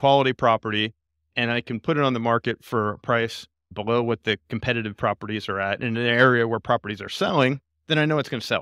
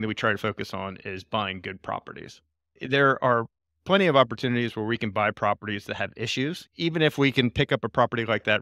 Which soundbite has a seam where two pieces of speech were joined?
second; 1 cut; at 6.6 s

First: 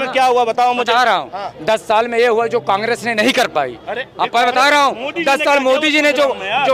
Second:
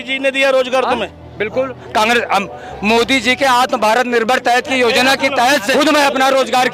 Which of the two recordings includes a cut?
second; 1 cut; at 5.7 s

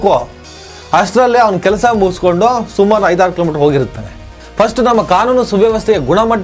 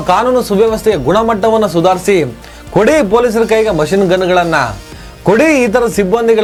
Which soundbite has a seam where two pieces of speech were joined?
first; 1 cut; at 4.0 s

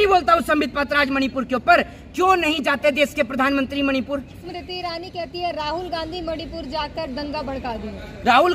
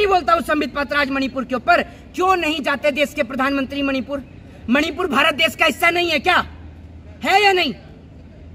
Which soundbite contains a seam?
first; 1 cut; at 4.5 s

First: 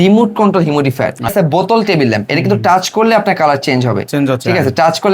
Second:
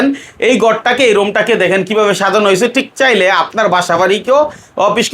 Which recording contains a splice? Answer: first; 1 cut; at 1.3 s

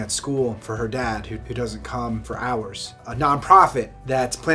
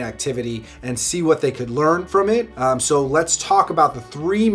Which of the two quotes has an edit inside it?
first; 1 cut; at 2.7 s

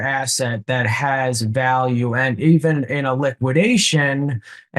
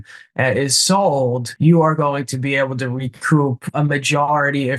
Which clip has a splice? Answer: second; 2 cuts; at 1.5 s, 3.7 s

